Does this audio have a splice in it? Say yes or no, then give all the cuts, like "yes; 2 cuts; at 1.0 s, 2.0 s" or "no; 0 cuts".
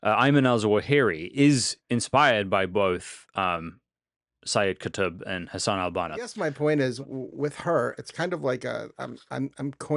yes; 1 cut; at 6.3 s